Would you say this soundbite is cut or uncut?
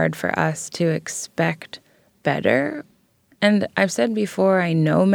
cut